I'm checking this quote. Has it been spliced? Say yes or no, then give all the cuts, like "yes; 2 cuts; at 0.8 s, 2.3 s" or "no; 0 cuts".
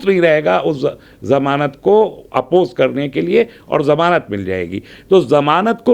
no; 0 cuts